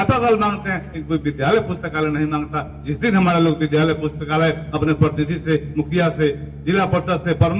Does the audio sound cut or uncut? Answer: uncut